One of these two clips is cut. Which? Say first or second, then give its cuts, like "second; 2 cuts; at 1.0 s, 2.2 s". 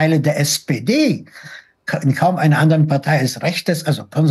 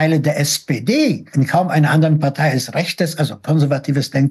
second; 1 cut; at 1.3 s